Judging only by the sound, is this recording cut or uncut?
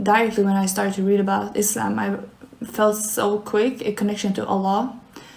uncut